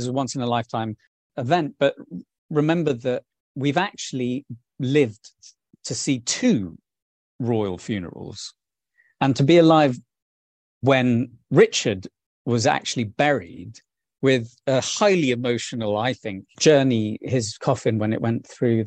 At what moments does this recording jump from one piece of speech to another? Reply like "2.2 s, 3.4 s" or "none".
1.3 s, 14.0 s, 16.5 s